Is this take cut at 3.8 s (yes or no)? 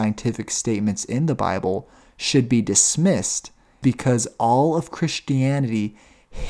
yes